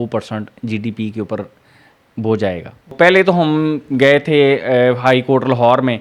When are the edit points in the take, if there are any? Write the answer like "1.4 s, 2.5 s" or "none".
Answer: 2.9 s